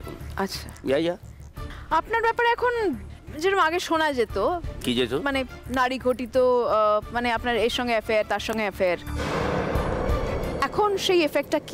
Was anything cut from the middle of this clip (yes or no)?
yes